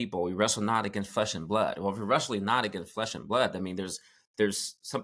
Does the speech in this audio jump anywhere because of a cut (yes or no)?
no